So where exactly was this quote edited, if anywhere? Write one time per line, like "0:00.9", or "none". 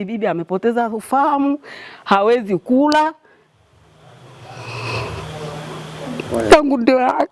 none